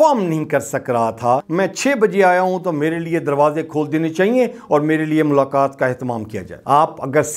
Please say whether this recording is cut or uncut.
cut